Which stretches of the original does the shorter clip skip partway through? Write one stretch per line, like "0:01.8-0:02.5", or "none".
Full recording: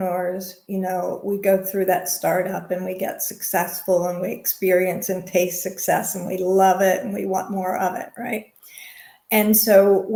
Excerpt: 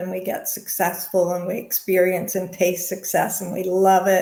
none